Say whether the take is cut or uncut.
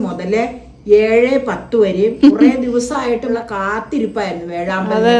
cut